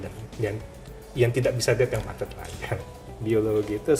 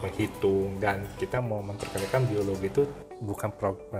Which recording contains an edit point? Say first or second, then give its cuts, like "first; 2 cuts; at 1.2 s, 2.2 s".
first; 1 cut; at 2.7 s